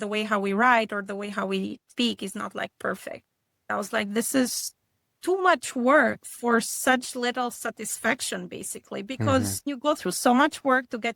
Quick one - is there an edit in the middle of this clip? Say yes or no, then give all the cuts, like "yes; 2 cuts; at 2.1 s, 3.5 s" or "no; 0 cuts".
yes; 2 cuts; at 3.6 s, 9.7 s